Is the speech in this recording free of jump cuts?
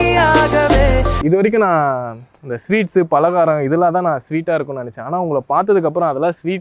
no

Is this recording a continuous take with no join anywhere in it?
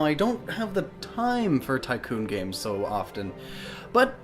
no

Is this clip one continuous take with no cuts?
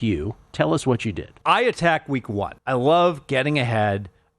no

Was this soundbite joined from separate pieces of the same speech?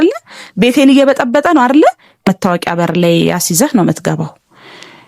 yes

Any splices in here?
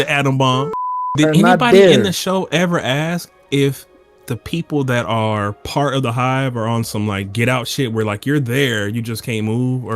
yes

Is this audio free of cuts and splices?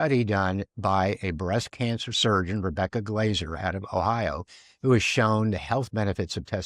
yes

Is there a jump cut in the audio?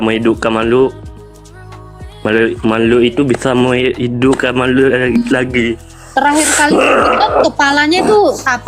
no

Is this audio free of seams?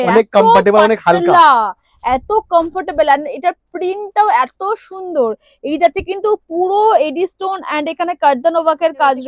yes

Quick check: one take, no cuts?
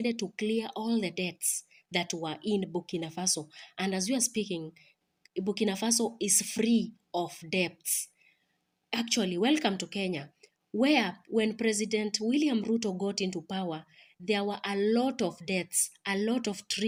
yes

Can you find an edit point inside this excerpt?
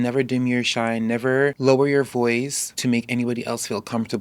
yes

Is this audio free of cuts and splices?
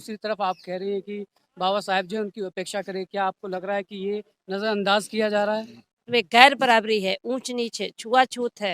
no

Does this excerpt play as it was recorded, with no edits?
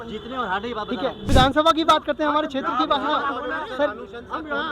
no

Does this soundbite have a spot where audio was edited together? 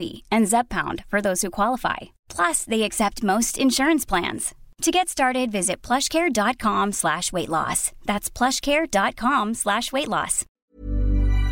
yes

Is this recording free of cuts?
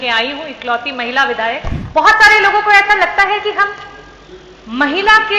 no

